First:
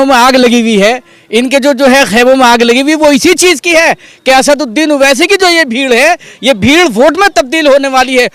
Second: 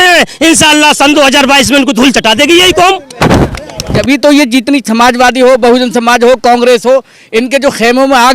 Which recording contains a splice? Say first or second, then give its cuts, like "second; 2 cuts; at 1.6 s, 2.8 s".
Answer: second; 1 cut; at 3.9 s